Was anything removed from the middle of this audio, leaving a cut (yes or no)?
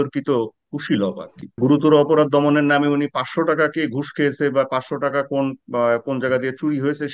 yes